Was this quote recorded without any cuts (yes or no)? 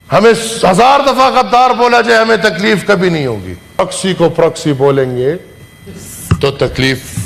no